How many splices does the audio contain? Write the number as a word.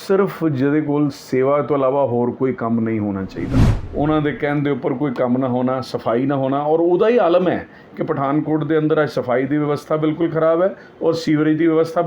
one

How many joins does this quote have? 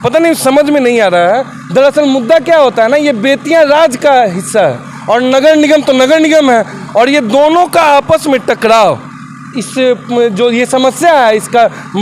zero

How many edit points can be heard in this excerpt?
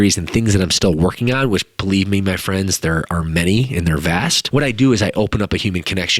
one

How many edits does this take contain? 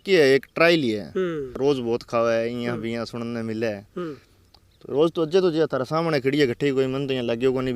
one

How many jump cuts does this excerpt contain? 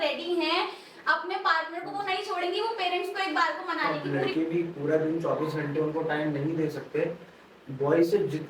one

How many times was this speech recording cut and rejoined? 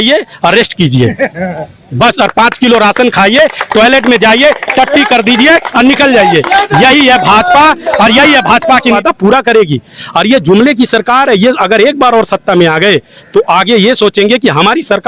one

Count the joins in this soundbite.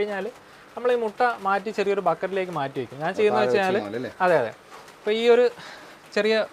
zero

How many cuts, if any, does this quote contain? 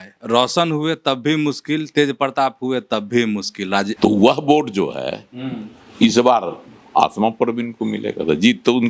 one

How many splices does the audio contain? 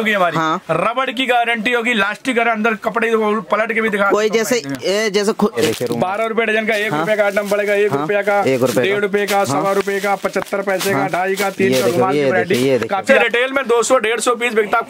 two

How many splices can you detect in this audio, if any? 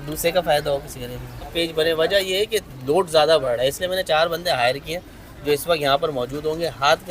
one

